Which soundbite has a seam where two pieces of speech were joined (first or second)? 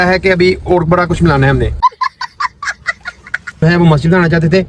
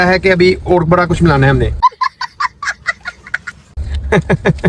first